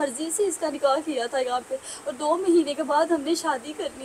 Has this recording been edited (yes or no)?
no